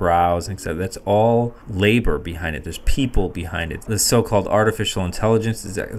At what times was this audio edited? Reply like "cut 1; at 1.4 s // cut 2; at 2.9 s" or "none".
cut 1; at 1.6 s // cut 2; at 3.8 s